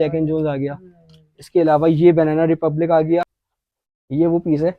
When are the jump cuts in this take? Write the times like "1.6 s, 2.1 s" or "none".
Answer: 3.4 s

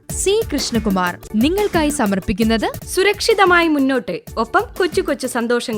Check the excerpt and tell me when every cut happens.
1.2 s

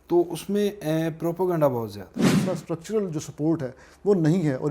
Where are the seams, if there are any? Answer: 2.2 s

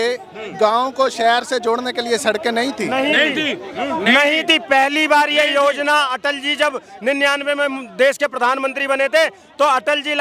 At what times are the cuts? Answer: none

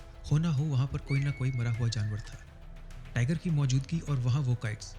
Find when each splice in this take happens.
none

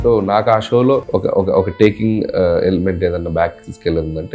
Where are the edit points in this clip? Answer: 1.0 s

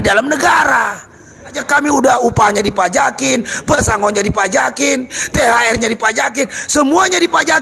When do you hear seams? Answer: 1.6 s

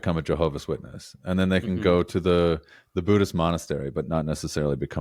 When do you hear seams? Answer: none

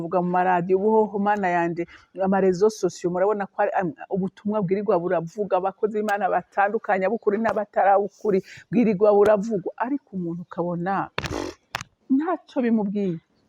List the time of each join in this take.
none

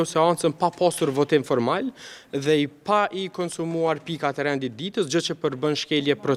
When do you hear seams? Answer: none

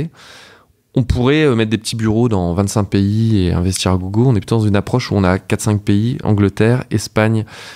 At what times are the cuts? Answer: 6.2 s

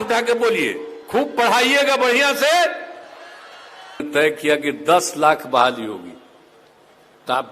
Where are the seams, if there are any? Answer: 4.0 s

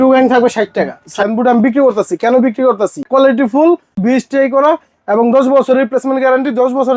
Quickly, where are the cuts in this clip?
1.0 s, 3.0 s, 4.0 s

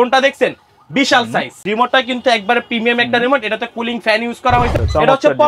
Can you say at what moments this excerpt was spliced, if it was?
1.6 s, 4.8 s

